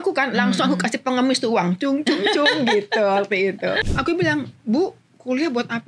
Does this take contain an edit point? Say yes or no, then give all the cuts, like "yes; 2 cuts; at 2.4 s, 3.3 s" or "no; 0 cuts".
yes; 1 cut; at 3.8 s